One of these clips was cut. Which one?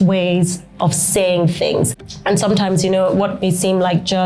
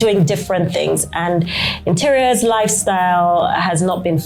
first; 1 cut; at 2.0 s

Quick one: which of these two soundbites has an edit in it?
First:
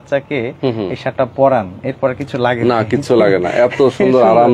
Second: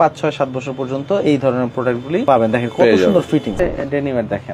second; 2 cuts; at 2.2 s, 3.5 s

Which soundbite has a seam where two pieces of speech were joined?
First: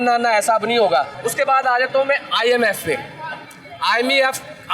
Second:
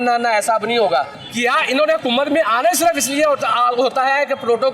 second; 1 cut; at 1.2 s

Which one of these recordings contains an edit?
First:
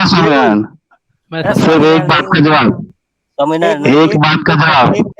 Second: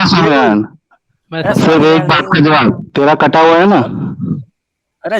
second; 1 cut; at 2.8 s

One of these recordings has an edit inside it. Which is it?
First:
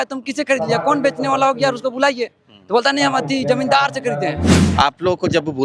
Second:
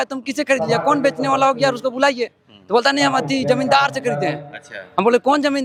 first; 1 cut; at 4.5 s

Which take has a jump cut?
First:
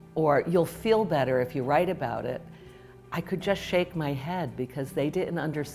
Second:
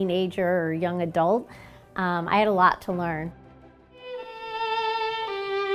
second; 1 cut; at 3.4 s

